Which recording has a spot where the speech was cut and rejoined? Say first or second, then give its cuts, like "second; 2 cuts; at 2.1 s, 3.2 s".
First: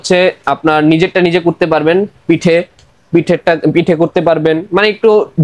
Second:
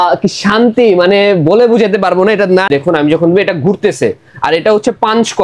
second; 1 cut; at 2.7 s